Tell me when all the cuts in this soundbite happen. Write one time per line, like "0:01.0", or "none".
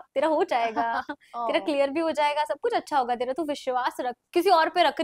none